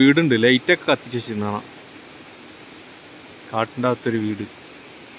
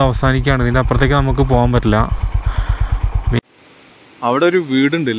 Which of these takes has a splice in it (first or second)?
second